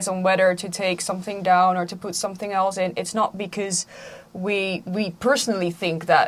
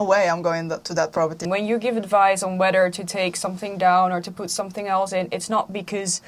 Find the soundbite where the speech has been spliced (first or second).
second